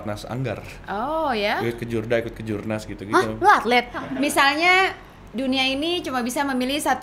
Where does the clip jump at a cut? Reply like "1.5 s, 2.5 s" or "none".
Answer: 4.0 s